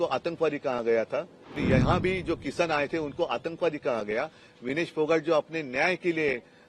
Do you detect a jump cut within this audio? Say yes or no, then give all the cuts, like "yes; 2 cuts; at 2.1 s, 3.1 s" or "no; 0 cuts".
yes; 1 cut; at 1.6 s